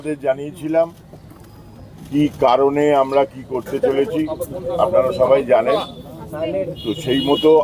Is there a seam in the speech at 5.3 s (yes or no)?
no